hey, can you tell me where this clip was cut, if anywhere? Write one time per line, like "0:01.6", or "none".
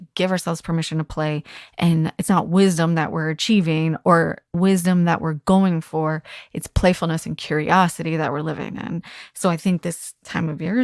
0:04.5